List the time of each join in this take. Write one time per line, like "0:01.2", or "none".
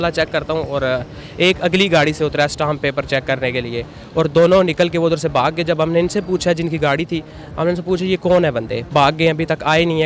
0:08.8